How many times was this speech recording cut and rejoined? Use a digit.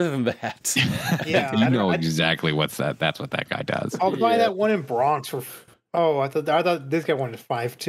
0